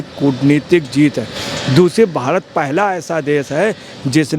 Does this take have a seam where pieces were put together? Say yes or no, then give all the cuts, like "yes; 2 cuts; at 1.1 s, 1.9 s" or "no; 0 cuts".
no; 0 cuts